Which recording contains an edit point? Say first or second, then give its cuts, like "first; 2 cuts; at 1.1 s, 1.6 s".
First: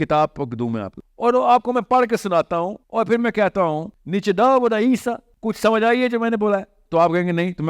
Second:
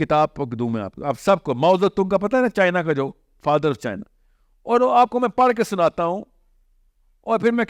first; 4 cuts; at 0.9 s, 2.8 s, 3.9 s, 5.3 s